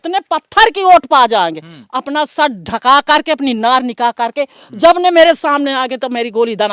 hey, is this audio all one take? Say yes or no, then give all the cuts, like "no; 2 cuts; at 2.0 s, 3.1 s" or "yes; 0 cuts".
yes; 0 cuts